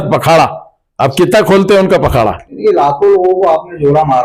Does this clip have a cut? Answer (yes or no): no